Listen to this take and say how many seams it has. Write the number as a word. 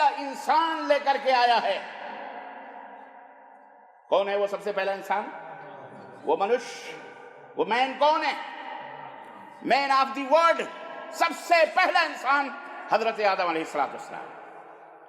zero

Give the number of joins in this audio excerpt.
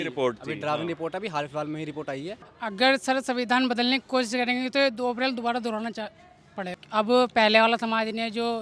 two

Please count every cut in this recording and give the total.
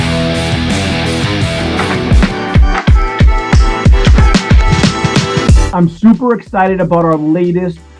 one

